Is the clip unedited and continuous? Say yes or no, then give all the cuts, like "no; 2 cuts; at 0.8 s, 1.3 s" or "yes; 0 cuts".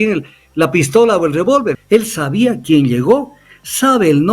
no; 1 cut; at 1.8 s